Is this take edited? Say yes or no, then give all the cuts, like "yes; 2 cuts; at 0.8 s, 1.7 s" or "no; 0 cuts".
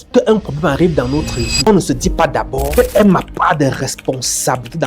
yes; 2 cuts; at 1.6 s, 2.7 s